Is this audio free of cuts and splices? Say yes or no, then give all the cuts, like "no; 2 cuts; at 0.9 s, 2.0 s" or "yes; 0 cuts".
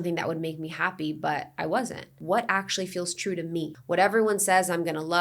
no; 2 cuts; at 2.2 s, 3.8 s